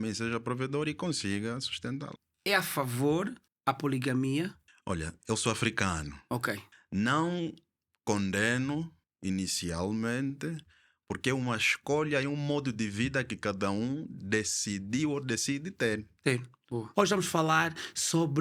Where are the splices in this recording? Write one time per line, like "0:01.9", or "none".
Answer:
0:02.2
0:06.7
0:16.5

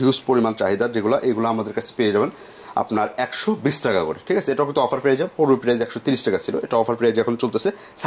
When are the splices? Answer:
none

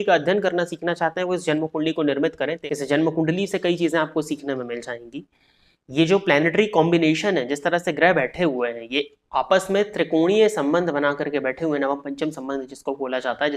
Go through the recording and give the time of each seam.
0:02.6

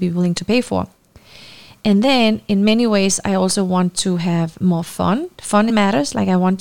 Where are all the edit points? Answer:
0:05.7

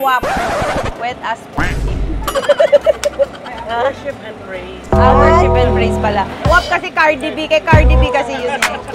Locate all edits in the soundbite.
none

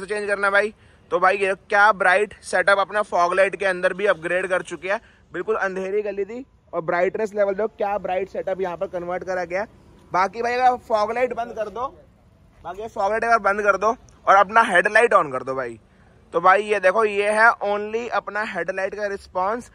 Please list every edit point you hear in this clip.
none

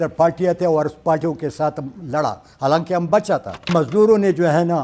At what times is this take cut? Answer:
0:03.7

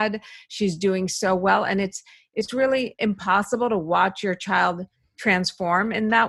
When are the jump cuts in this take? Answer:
none

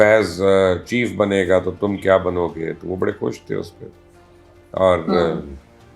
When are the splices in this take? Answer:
none

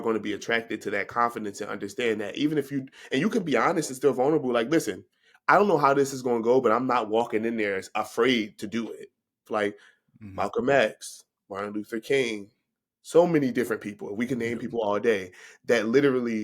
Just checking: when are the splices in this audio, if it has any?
0:09.5

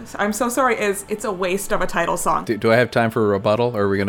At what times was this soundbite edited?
0:02.4

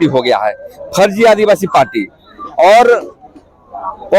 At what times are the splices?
none

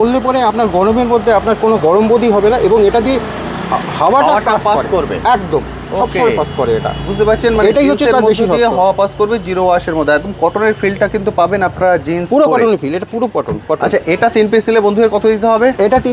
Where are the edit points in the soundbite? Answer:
none

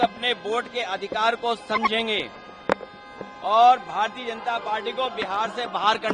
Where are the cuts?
none

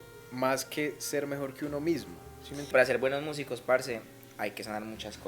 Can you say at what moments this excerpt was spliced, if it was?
0:02.7

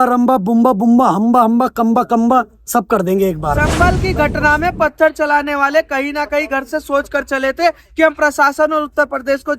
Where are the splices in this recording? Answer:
0:03.7

